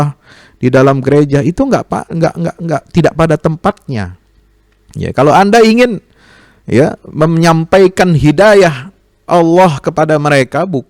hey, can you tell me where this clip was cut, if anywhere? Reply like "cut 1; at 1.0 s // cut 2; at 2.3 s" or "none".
none